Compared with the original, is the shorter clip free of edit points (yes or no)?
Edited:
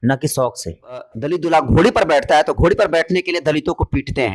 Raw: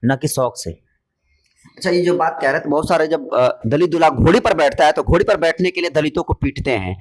no